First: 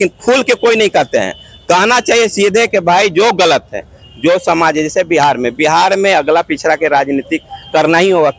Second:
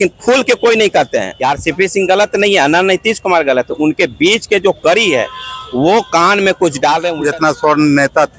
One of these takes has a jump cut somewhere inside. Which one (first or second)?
second